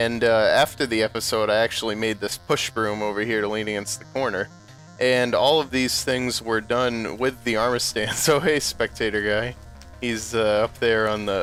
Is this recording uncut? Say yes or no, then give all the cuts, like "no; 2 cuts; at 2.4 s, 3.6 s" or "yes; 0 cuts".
yes; 0 cuts